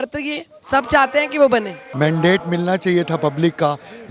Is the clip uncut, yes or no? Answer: no